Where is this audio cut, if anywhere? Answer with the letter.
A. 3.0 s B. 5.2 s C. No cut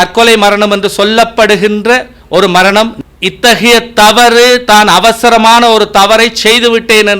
A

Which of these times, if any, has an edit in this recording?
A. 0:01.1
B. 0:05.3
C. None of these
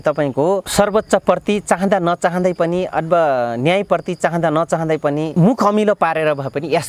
B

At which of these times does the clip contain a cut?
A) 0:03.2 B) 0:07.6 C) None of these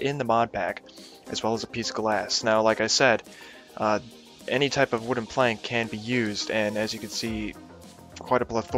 A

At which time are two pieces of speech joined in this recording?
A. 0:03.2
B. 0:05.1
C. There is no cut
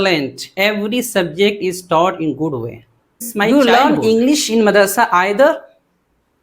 A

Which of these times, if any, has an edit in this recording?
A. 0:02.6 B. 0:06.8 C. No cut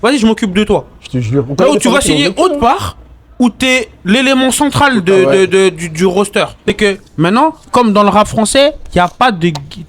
B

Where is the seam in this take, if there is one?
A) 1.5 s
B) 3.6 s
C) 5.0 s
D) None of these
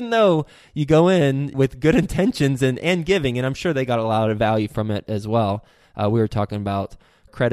A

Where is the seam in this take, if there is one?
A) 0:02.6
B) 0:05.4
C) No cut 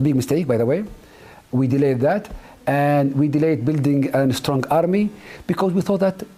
C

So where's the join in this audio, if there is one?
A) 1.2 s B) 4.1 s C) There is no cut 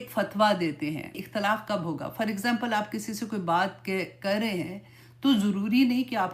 A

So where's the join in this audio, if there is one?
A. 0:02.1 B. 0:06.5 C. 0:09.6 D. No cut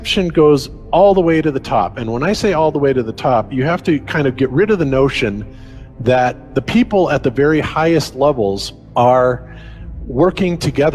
D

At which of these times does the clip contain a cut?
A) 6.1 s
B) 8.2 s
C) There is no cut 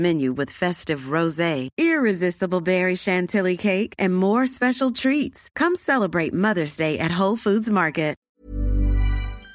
B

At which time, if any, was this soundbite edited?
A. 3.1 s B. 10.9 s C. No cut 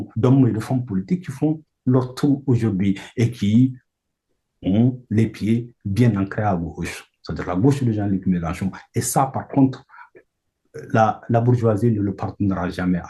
C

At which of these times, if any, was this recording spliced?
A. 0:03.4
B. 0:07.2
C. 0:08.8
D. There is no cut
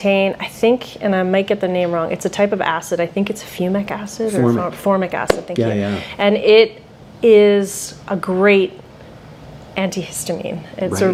D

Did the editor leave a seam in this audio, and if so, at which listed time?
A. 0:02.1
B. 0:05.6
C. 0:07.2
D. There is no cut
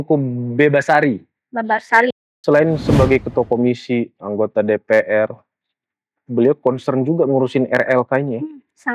A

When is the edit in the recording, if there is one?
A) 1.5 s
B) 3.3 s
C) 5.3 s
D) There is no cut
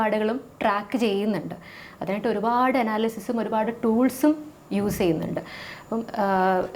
D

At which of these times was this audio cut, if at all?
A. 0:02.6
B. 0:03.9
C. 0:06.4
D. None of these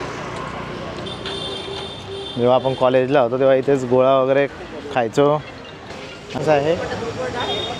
C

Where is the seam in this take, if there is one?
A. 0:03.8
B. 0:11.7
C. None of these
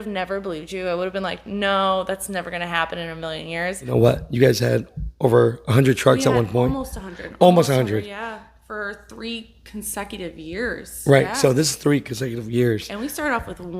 A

